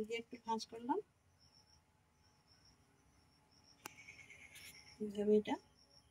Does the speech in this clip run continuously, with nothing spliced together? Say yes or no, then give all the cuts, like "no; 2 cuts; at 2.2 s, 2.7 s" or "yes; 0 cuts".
yes; 0 cuts